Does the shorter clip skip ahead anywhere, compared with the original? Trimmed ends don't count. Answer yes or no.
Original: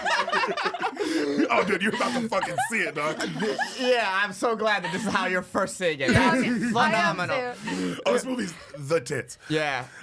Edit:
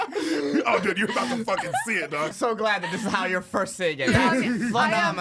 yes